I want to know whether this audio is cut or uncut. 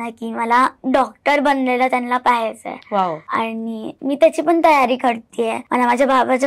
cut